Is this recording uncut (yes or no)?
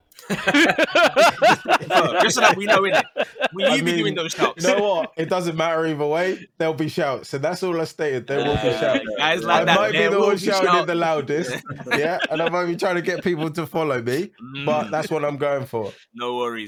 yes